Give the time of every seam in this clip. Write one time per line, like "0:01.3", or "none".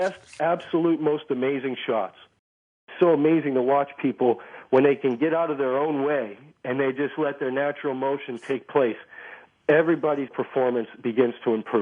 0:02.8
0:10.3